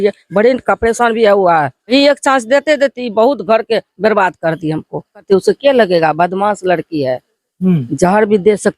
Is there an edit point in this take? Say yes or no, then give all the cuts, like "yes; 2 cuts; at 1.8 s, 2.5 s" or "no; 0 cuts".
yes; 2 cuts; at 1.9 s, 5.2 s